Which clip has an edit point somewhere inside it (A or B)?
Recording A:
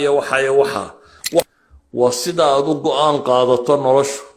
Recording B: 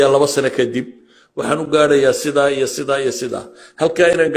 A